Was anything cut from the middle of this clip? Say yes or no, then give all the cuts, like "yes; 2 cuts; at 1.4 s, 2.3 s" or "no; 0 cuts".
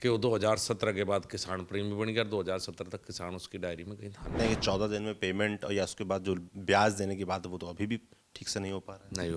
yes; 1 cut; at 4.3 s